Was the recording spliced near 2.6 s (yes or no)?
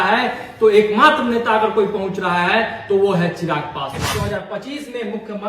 no